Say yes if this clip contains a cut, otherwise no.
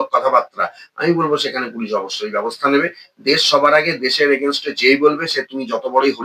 no